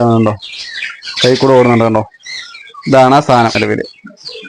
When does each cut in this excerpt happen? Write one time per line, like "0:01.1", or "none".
0:03.6